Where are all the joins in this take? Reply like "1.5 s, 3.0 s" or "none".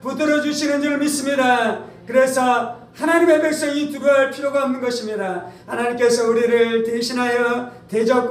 5.6 s